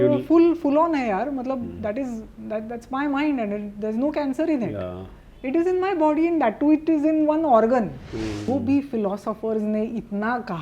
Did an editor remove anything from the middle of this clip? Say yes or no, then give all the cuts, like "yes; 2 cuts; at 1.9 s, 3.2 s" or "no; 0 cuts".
yes; 1 cut; at 8.5 s